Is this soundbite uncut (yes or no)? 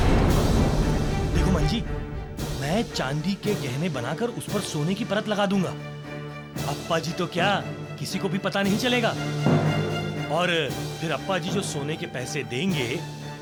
yes